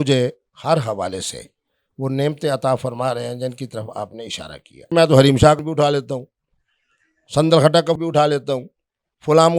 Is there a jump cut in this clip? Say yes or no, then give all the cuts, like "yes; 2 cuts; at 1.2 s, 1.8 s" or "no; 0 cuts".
yes; 3 cuts; at 4.9 s, 5.6 s, 8.0 s